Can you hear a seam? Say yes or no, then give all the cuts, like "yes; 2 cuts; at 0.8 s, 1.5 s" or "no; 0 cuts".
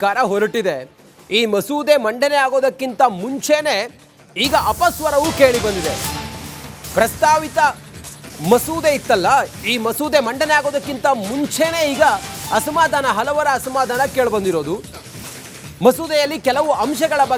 no; 0 cuts